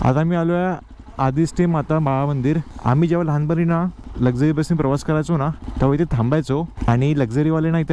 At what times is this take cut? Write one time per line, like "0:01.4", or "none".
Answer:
0:02.7
0:04.0
0:05.6
0:06.7